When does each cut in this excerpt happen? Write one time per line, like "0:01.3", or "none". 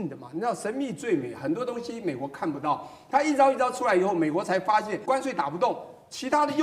0:05.0